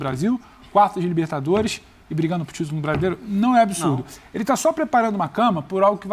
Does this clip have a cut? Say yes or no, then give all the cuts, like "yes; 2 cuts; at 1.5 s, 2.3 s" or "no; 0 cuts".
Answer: no; 0 cuts